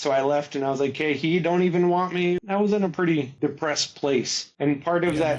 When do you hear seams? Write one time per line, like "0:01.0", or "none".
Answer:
0:02.4
0:03.3
0:04.4